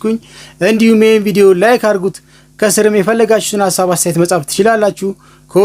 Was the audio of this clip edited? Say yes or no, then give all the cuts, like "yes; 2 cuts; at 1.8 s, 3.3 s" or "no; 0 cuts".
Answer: no; 0 cuts